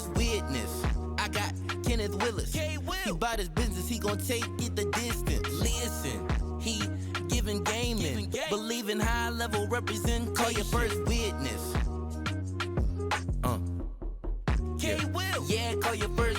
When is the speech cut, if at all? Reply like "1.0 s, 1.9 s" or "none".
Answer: none